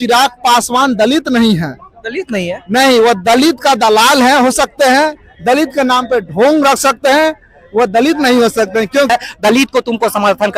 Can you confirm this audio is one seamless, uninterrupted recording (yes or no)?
no